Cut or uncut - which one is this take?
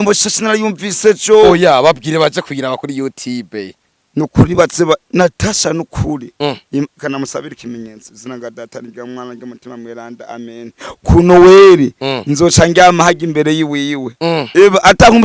uncut